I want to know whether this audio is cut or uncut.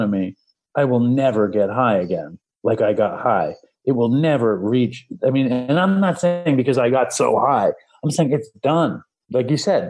uncut